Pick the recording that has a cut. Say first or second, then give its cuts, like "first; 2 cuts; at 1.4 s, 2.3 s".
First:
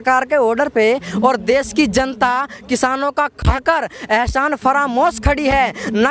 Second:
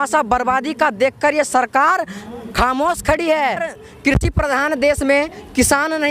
second; 1 cut; at 3.7 s